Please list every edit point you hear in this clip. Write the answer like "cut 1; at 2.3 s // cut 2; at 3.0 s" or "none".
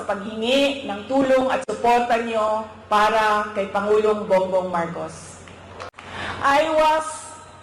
cut 1; at 6.0 s